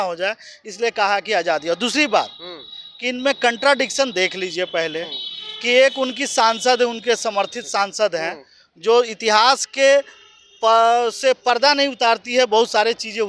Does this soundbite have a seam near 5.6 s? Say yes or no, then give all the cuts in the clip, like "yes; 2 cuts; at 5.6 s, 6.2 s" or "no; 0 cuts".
no; 0 cuts